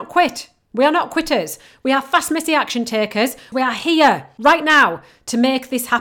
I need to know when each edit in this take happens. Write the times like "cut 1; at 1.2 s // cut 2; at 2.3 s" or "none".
cut 1; at 3.5 s // cut 2; at 4.3 s